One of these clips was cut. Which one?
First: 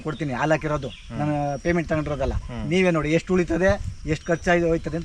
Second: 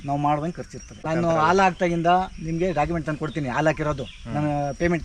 second; 1 cut; at 1.0 s

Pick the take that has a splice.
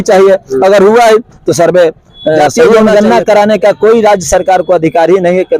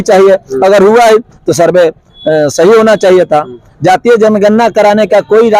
first; 1 cut; at 2.6 s

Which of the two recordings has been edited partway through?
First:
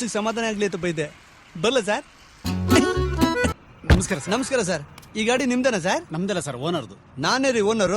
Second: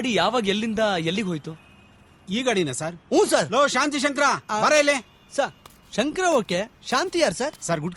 first; 1 cut; at 3.6 s

